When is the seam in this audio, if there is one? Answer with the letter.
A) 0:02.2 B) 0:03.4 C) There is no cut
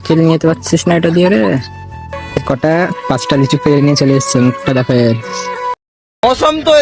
A